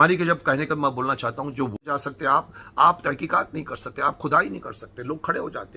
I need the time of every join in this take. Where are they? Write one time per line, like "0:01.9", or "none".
0:01.8